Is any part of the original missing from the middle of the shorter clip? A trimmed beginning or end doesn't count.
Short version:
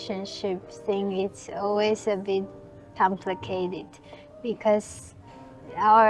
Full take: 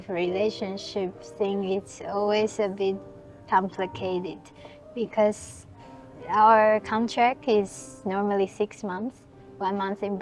no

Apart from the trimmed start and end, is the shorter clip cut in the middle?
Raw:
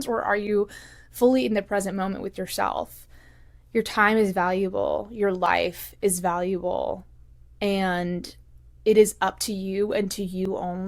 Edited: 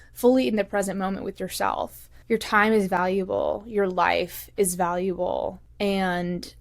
yes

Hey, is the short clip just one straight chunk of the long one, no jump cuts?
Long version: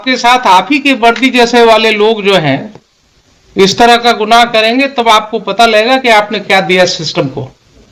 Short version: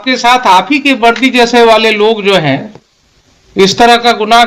yes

